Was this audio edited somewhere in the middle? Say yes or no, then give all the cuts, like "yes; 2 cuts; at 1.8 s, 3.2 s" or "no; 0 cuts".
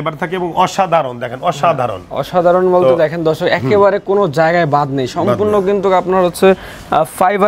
no; 0 cuts